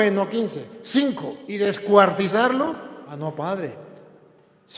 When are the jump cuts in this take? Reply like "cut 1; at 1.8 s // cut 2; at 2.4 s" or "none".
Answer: cut 1; at 1.5 s // cut 2; at 3.1 s